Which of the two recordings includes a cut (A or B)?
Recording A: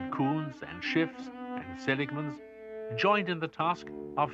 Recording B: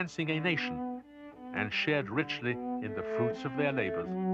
B